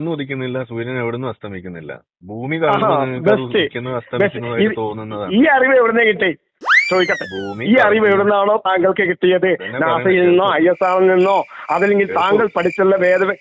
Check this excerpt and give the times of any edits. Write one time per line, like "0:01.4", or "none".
none